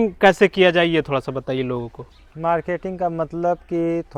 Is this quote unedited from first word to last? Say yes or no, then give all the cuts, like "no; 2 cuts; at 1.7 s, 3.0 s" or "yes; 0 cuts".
yes; 0 cuts